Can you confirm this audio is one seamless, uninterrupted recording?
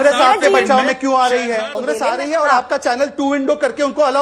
no; 1 cut; at 1.8 s

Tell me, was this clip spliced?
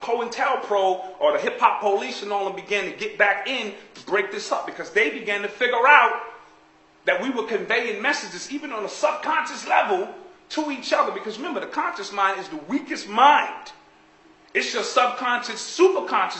no; 0 cuts

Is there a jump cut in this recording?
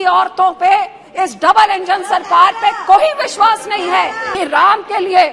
yes; 1 cut; at 4.3 s

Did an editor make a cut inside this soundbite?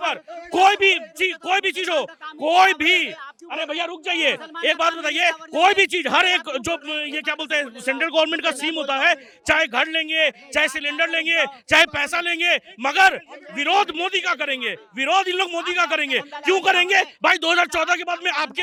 no; 0 cuts

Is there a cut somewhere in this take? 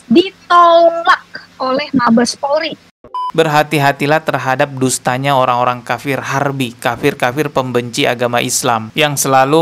yes; 1 cut; at 3.3 s

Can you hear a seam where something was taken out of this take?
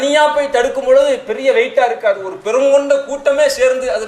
no; 0 cuts

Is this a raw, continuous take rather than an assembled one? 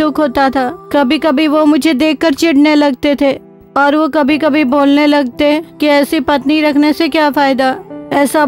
yes; 0 cuts

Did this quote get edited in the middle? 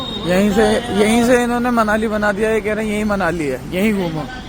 no; 0 cuts

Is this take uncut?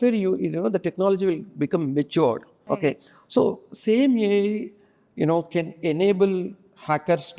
yes; 0 cuts

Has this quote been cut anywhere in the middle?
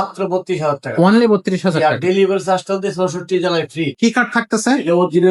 yes; 1 cut; at 3.9 s

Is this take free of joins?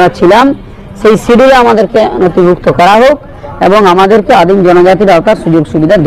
yes; 0 cuts

